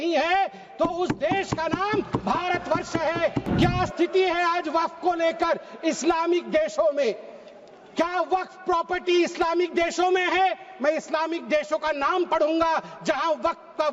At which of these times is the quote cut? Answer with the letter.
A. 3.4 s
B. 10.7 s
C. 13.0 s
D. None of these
A